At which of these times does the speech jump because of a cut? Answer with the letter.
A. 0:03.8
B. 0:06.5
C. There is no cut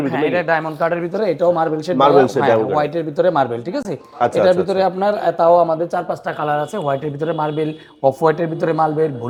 C